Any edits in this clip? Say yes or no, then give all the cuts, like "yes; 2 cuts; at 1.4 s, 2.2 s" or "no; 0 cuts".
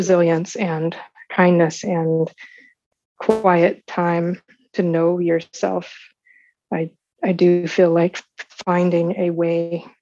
no; 0 cuts